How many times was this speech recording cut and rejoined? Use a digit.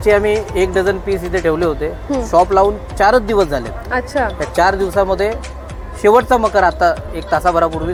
0